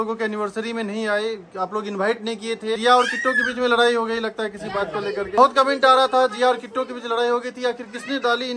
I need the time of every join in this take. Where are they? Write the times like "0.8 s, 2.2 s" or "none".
2.8 s, 5.4 s